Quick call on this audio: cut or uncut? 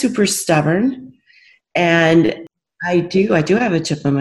cut